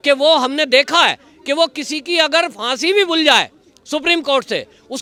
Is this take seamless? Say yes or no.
yes